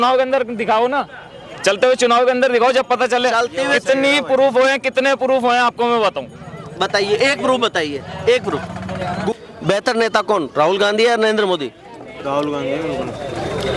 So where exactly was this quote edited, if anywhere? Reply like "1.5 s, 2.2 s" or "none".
9.3 s